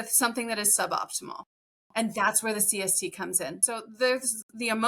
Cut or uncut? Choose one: cut